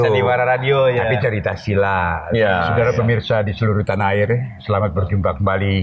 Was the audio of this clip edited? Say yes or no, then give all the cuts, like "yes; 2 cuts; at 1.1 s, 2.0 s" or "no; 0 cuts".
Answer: yes; 1 cut; at 2.7 s